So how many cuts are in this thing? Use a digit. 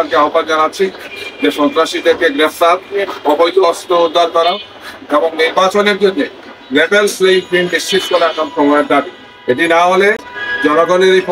0